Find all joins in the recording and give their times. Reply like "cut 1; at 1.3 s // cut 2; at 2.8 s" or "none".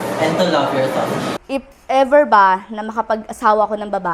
cut 1; at 1.3 s